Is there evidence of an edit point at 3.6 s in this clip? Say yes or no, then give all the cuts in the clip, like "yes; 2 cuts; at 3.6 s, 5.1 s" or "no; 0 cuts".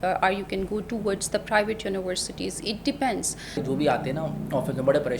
yes; 1 cut; at 3.6 s